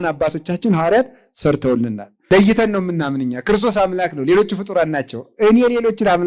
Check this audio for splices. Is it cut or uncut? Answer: cut